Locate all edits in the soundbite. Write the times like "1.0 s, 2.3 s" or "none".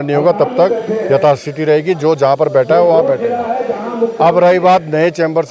none